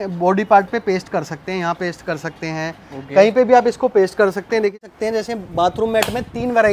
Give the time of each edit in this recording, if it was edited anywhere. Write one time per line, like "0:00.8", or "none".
0:04.8